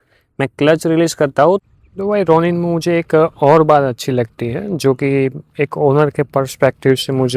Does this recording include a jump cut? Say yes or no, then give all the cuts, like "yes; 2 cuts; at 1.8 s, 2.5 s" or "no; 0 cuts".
yes; 1 cut; at 1.6 s